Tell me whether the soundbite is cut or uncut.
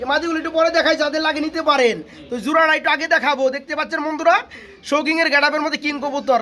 uncut